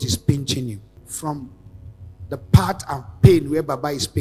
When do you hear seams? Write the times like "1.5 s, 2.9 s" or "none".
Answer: 0.9 s